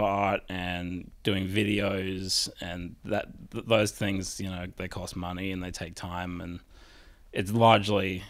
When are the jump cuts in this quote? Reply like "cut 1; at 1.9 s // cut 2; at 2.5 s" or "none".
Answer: none